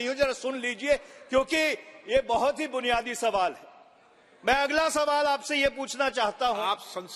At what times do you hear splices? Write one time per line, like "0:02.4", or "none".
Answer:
none